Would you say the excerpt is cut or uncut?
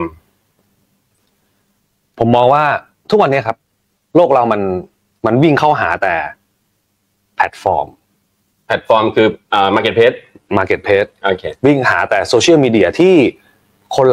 uncut